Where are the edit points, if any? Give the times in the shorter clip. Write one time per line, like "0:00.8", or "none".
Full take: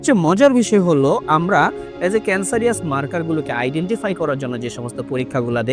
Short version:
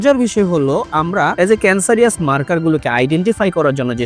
0:01.3